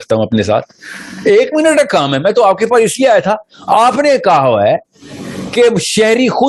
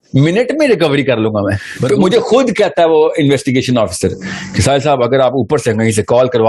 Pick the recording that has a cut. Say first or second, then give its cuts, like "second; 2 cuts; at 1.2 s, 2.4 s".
second; 1 cut; at 1.7 s